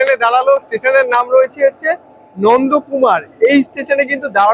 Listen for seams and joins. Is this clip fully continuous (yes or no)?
yes